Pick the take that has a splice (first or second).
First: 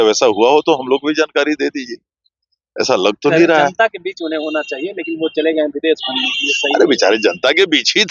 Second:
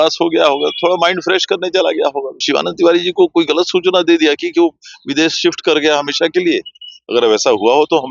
second